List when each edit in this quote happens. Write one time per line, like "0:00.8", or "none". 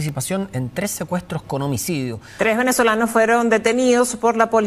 0:02.2